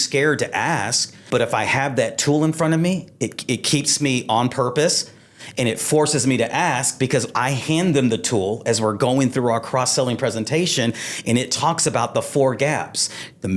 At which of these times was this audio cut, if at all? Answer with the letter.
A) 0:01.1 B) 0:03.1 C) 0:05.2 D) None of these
A